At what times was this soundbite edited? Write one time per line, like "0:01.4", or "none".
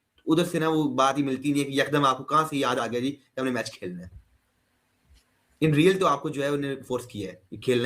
none